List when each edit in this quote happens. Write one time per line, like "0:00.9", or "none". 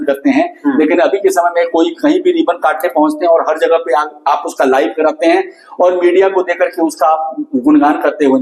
none